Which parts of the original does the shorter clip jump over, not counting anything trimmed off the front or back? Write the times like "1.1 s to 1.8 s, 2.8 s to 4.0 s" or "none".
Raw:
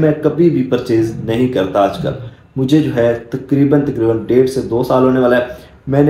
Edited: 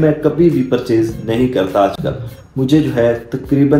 none